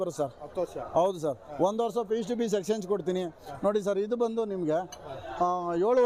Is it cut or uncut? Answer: uncut